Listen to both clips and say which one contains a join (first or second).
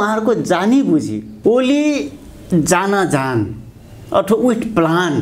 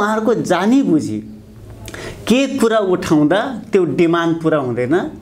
first